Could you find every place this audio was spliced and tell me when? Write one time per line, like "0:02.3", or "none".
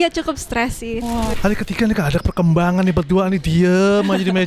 0:01.4